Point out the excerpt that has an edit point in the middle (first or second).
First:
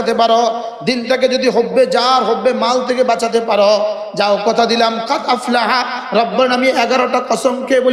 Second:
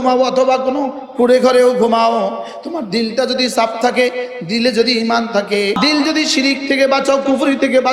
second